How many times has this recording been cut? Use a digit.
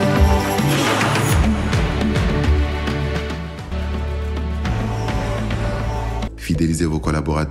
1